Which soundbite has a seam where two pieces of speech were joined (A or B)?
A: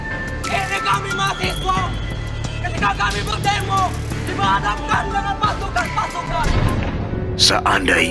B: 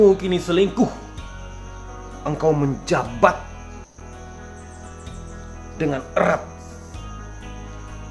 A